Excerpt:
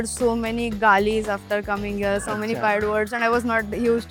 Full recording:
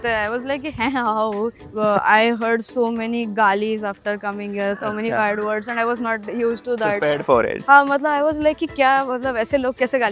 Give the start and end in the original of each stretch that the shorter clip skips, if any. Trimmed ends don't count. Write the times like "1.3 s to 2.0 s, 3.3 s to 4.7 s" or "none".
none